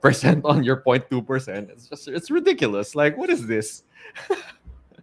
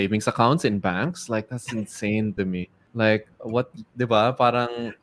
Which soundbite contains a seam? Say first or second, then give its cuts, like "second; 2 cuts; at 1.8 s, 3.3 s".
second; 1 cut; at 2.8 s